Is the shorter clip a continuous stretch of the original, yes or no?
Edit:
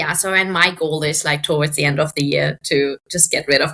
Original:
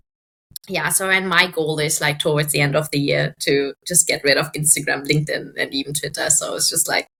yes